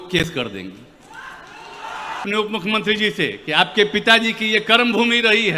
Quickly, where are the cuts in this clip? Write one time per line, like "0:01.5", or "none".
0:02.2